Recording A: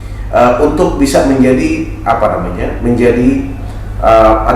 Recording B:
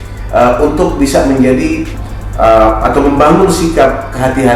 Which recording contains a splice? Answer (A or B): B